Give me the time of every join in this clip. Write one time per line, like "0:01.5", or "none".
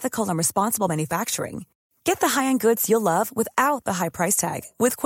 none